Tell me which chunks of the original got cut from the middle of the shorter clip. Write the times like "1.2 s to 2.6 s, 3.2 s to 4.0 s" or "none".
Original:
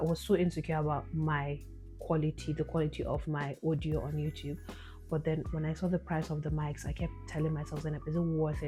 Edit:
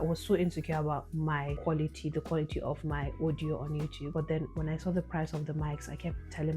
1.5 s to 2.0 s, 4.4 s to 5.0 s